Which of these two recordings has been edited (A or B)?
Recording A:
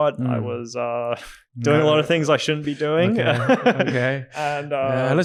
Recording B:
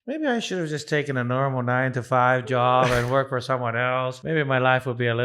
B